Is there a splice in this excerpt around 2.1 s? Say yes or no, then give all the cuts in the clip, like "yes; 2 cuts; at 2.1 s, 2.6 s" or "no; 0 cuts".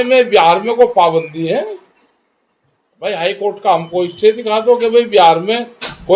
no; 0 cuts